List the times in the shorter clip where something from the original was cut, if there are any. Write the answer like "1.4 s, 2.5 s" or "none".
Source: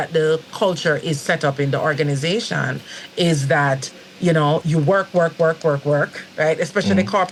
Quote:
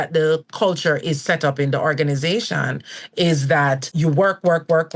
3.9 s